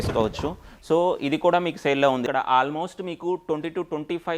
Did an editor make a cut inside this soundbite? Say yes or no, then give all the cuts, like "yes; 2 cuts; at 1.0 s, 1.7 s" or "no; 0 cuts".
yes; 1 cut; at 2.2 s